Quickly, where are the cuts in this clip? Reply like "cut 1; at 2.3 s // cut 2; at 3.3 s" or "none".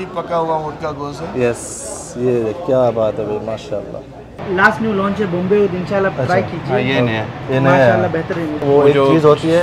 cut 1; at 4.4 s // cut 2; at 8.6 s

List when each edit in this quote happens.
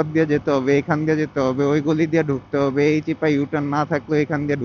none

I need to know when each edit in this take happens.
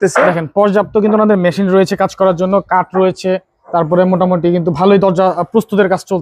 cut 1; at 3.5 s

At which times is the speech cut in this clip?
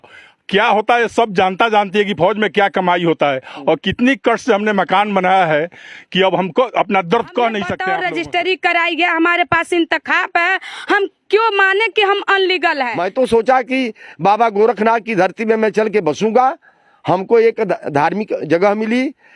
cut 1; at 7.8 s // cut 2; at 12.9 s

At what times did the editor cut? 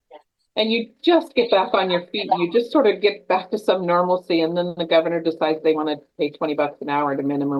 none

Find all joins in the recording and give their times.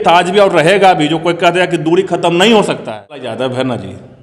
cut 1; at 3.3 s

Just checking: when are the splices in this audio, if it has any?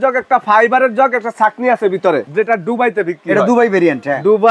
cut 1; at 2.2 s

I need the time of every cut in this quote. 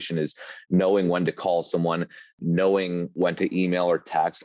cut 1; at 2.3 s // cut 2; at 3.1 s

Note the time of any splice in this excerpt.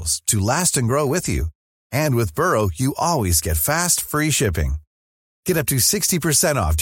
none

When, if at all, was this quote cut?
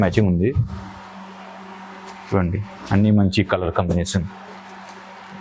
none

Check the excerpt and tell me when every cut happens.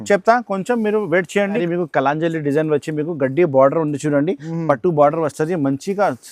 cut 1; at 1.6 s

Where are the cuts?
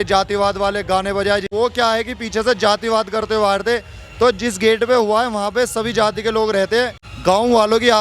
cut 1; at 1.5 s // cut 2; at 7.0 s

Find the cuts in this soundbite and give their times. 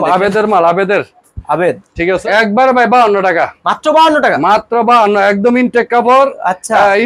cut 1; at 2.2 s

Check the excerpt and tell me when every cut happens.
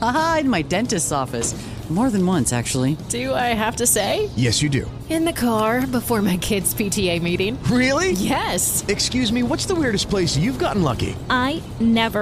none

